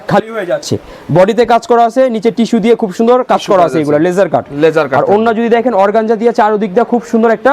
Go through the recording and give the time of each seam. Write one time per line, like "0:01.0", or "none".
none